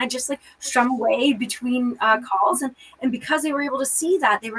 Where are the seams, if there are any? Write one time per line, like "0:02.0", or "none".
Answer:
none